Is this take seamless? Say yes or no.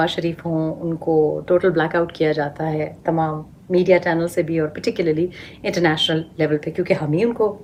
yes